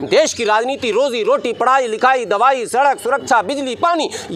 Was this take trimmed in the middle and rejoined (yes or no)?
no